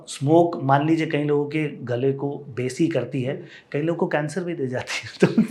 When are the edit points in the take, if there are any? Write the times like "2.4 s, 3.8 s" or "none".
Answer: none